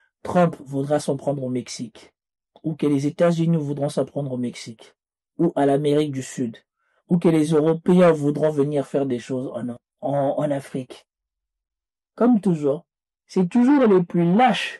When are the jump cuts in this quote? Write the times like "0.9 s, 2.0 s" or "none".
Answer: 9.7 s, 11.5 s